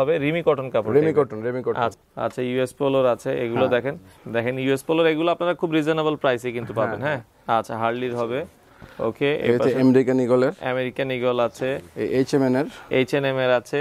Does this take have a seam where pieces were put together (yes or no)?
yes